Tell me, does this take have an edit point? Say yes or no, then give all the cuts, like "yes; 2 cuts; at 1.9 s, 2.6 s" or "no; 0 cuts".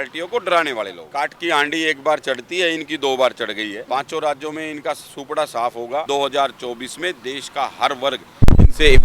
yes; 3 cuts; at 1.0 s, 3.8 s, 6.1 s